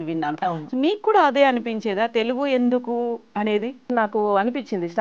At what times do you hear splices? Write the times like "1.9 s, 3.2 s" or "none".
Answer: 3.9 s